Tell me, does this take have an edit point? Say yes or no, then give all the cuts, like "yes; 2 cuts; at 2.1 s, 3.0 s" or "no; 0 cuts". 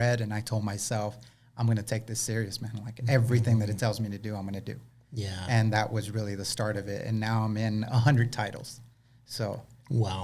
no; 0 cuts